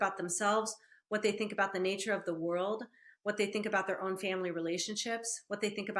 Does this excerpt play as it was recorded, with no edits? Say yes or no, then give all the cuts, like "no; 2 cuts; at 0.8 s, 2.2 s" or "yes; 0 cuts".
yes; 0 cuts